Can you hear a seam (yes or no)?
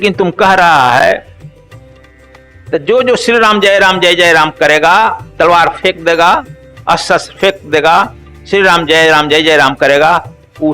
yes